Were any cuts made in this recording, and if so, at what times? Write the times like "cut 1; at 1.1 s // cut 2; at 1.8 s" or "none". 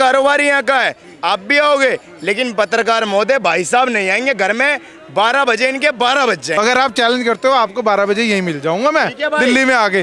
cut 1; at 6.5 s